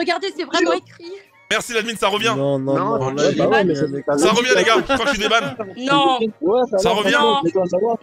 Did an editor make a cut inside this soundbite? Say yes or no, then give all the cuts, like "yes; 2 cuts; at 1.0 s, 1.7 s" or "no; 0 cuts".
yes; 2 cuts; at 1.4 s, 5.6 s